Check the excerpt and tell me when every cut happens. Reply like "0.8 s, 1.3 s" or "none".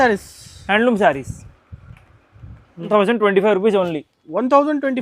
2.9 s